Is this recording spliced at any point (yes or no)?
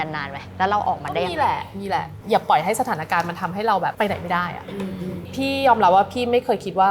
yes